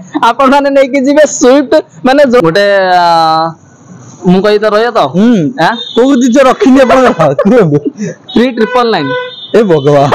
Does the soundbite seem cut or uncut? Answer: cut